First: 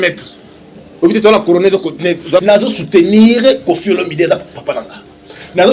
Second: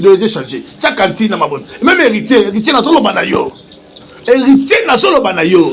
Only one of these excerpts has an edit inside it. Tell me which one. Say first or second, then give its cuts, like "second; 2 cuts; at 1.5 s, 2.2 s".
first; 1 cut; at 2.4 s